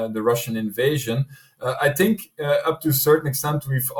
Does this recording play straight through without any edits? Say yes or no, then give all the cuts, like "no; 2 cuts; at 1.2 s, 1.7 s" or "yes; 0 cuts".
yes; 0 cuts